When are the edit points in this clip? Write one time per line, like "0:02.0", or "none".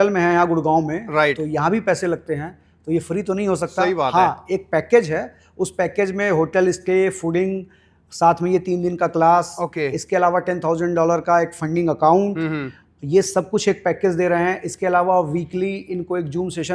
none